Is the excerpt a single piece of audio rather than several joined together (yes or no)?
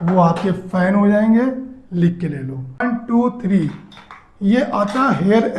no